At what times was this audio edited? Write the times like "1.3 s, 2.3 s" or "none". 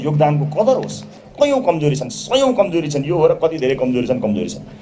1.3 s